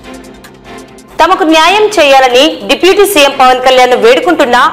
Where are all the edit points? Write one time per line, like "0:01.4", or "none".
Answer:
0:01.0